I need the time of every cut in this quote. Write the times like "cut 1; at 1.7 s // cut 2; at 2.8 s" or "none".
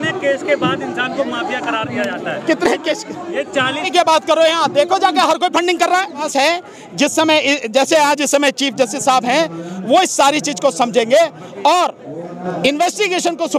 cut 1; at 3.9 s // cut 2; at 6.3 s